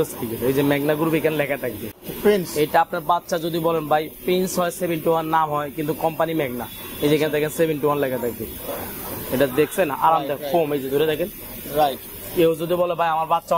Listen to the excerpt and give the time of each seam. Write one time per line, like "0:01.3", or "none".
none